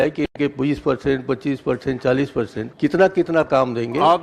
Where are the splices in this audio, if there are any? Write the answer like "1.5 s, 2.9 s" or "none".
2.6 s